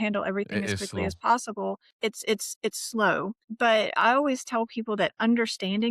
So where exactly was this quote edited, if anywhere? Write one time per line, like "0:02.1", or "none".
0:01.9
0:03.4